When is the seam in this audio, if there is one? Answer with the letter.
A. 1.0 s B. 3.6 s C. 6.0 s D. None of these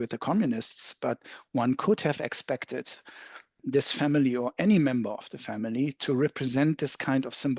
B